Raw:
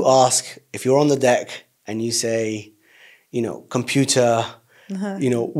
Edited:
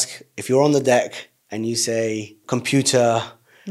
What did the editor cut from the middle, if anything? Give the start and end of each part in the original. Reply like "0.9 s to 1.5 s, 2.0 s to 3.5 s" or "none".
2.7 s to 3.6 s